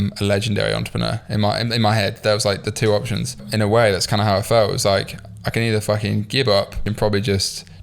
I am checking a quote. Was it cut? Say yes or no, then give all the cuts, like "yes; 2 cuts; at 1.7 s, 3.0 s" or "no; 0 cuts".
yes; 2 cuts; at 3.4 s, 6.8 s